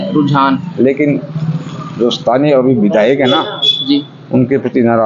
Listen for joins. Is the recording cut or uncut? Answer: uncut